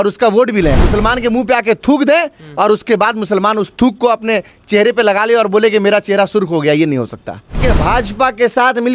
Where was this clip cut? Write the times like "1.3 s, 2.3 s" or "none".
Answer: 0.8 s, 7.6 s